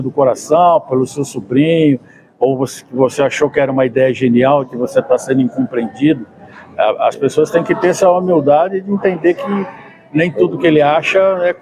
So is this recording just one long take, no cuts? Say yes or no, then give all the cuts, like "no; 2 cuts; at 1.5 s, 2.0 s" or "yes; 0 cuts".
yes; 0 cuts